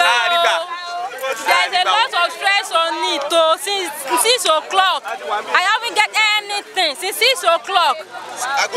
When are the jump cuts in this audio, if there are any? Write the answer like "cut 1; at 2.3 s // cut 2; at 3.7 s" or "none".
none